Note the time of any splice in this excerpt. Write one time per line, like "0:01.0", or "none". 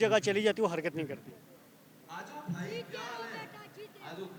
none